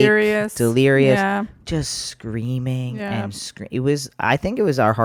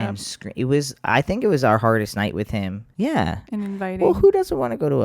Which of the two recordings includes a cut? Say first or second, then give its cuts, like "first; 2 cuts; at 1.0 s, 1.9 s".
second; 1 cut; at 2.8 s